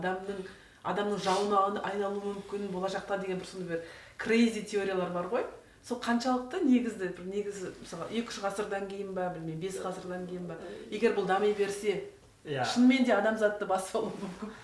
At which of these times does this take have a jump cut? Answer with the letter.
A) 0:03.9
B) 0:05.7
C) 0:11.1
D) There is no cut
D